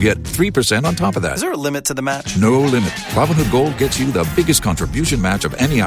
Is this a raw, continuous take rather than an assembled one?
yes; 0 cuts

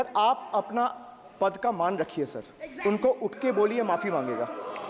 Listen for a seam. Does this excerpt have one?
no; 0 cuts

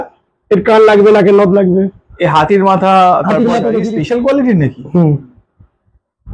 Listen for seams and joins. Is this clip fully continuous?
no; 1 cut; at 3.9 s

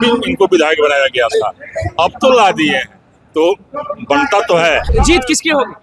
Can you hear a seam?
yes; 1 cut; at 4.9 s

